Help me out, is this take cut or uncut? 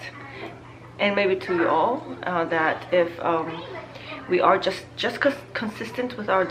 uncut